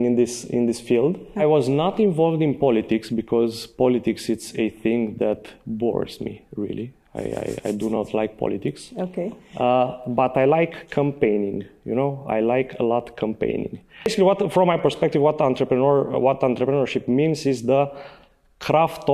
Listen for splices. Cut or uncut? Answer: cut